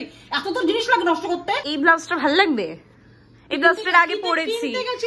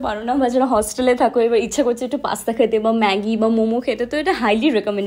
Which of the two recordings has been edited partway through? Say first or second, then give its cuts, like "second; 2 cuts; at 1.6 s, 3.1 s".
first; 1 cut; at 1.7 s